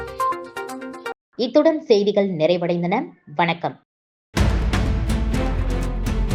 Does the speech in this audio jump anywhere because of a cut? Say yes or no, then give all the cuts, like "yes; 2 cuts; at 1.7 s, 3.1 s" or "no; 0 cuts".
no; 0 cuts